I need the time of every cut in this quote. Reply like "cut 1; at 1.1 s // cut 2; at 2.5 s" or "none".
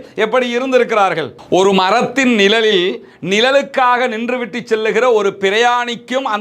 cut 1; at 1.4 s